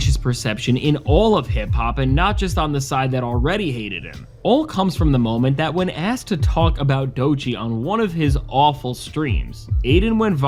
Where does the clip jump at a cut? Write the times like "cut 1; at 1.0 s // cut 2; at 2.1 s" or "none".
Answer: none